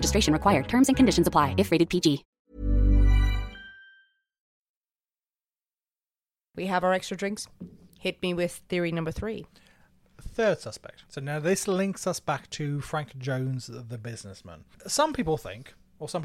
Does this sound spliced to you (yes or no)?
no